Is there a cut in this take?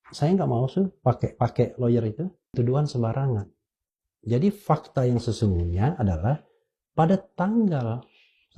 yes; 1 cut; at 2.5 s

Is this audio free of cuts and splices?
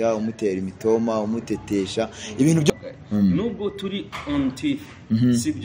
no; 1 cut; at 2.7 s

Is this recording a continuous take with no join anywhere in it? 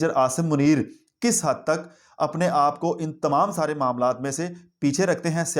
yes; 0 cuts

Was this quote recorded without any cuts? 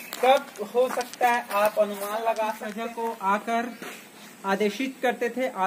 no; 1 cut; at 2.7 s

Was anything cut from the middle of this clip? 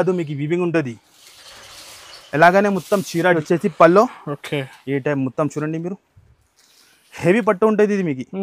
yes; 1 cut; at 3.4 s

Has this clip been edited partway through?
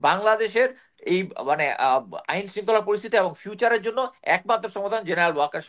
no; 0 cuts

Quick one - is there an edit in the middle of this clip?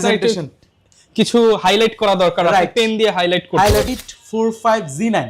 yes; 1 cut; at 3.9 s

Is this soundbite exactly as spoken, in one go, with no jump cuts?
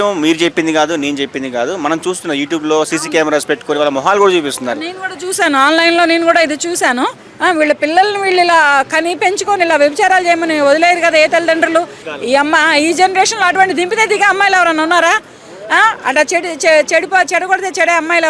no; 2 cuts; at 7.2 s, 12.0 s

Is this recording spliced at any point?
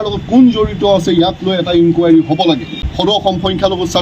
yes; 1 cut; at 2.8 s

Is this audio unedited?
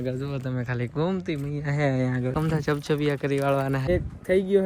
no; 2 cuts; at 2.3 s, 3.9 s

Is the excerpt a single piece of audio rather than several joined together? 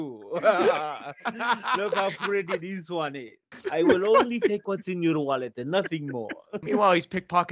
no; 2 cuts; at 3.6 s, 6.6 s

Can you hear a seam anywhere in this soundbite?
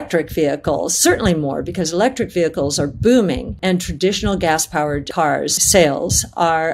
yes; 2 cuts; at 3.5 s, 5.1 s

